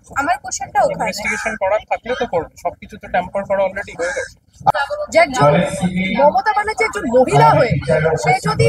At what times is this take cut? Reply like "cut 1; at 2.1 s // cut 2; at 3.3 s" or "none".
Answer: cut 1; at 4.7 s